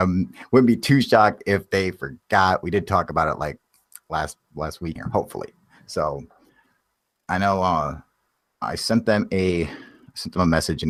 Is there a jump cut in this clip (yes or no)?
no